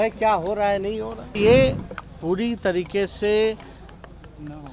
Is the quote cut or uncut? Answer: cut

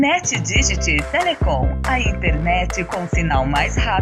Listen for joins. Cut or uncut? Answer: uncut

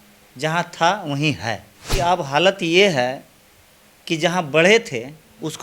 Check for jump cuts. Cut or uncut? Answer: cut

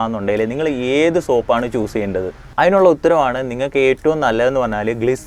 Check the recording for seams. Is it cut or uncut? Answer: uncut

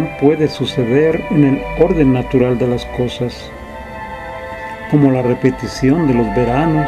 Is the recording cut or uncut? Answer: cut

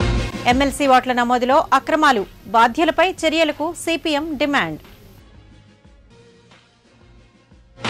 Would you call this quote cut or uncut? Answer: uncut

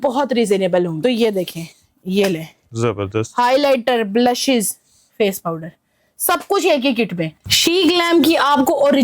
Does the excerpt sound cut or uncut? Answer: cut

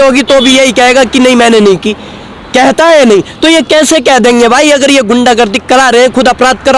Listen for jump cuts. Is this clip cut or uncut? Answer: uncut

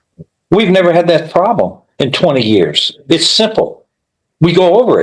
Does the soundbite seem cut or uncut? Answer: uncut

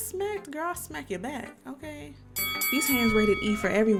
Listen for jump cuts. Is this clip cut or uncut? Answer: uncut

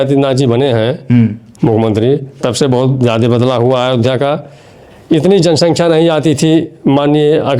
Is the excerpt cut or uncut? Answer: uncut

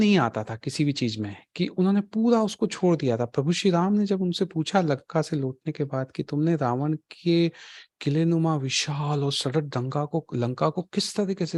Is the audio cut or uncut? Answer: uncut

